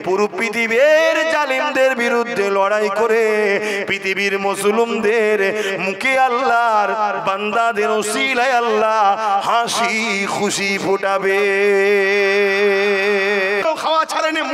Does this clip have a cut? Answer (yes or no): yes